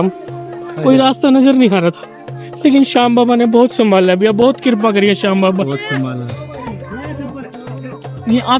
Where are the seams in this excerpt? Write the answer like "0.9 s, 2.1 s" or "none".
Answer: none

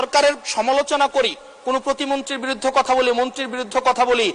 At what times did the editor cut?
none

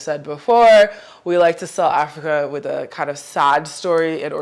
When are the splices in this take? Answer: none

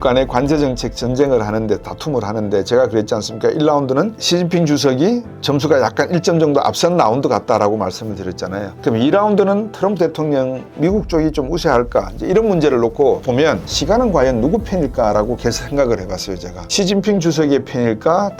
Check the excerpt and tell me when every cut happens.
none

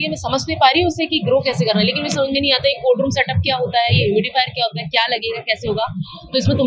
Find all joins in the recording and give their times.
none

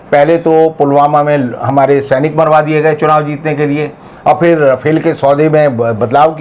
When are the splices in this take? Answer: none

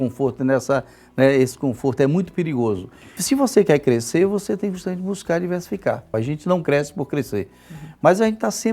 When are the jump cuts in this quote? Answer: 3.2 s, 6.1 s

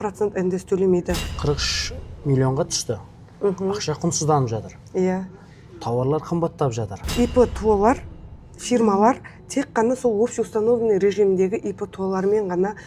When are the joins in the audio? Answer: 1.3 s, 7.0 s

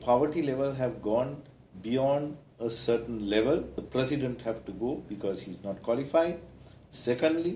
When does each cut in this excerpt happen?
3.8 s

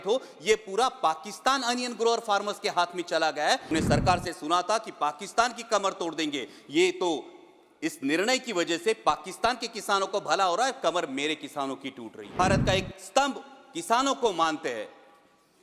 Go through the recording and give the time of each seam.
3.7 s, 12.3 s

